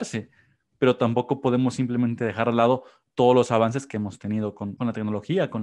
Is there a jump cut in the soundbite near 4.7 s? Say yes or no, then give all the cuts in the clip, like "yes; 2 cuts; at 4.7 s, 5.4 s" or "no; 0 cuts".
yes; 1 cut; at 4.7 s